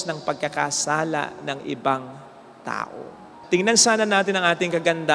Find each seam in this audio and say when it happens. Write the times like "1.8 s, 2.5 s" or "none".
none